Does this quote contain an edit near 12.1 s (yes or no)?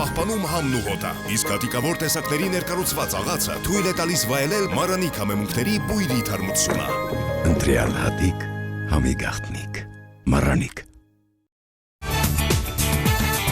yes